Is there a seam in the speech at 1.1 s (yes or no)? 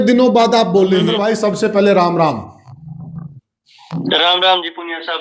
yes